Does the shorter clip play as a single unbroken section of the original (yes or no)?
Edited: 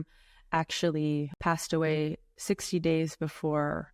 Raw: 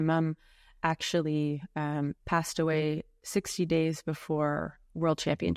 no